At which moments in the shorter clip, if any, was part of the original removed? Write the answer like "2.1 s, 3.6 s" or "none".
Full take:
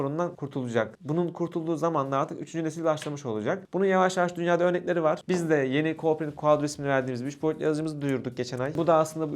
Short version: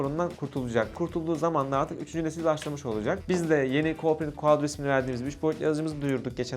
0.9 s, 3.2 s